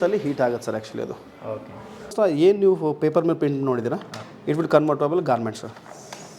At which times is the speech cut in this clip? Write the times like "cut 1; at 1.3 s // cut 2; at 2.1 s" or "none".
cut 1; at 2.1 s